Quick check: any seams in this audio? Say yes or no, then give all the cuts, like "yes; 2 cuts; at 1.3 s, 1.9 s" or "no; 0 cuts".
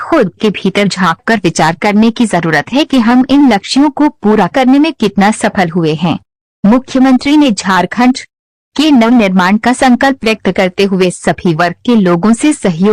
no; 0 cuts